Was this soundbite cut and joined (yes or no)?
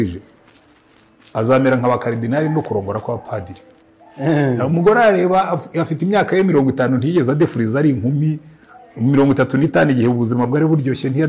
no